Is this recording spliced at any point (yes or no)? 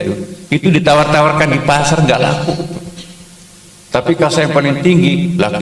no